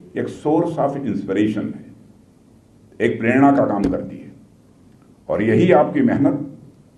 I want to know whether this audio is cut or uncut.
uncut